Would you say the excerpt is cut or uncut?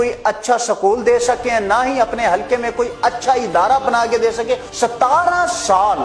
cut